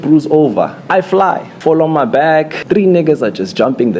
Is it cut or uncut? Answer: cut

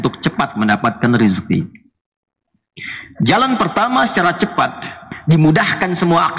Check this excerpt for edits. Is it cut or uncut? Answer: cut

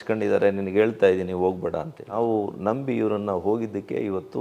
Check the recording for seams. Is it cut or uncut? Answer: cut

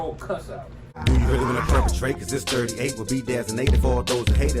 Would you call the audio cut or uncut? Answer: cut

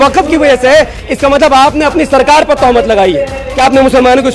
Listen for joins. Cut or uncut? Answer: cut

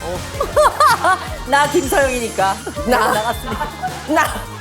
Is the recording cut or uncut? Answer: cut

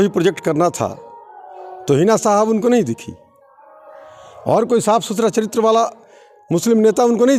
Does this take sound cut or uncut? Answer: uncut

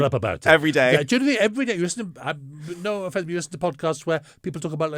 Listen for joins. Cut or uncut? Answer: uncut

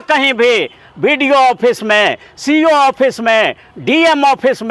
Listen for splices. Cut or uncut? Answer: uncut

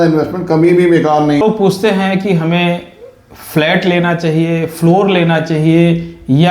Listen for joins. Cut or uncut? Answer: cut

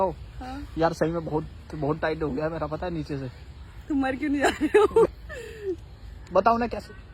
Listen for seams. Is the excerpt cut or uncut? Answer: uncut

